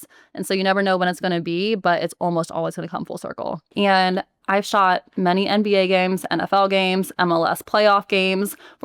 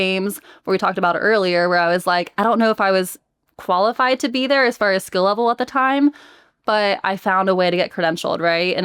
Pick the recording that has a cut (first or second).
first